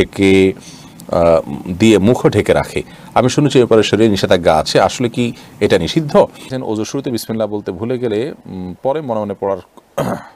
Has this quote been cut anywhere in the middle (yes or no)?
yes